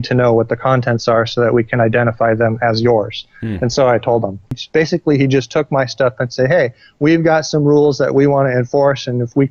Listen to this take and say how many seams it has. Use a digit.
1